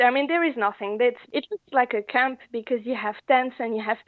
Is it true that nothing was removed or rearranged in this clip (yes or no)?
no